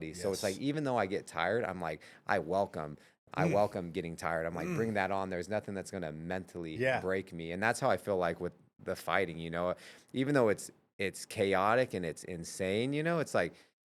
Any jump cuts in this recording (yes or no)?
no